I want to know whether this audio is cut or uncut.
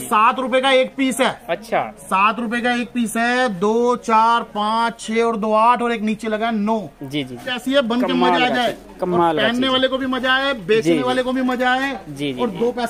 cut